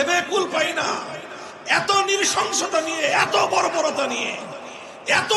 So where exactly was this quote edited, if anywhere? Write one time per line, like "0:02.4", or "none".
none

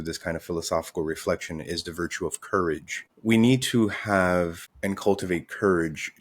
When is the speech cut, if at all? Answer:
0:04.6

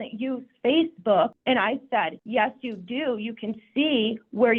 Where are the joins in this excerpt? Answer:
0:01.9

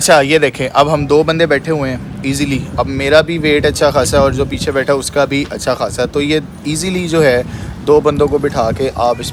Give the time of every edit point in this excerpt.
none

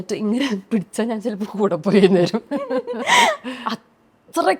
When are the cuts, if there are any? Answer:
none

